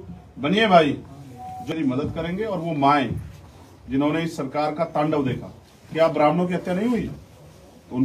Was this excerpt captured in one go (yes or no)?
no